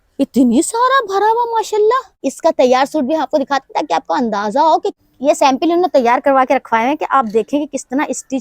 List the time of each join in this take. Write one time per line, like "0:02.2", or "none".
0:02.3
0:04.9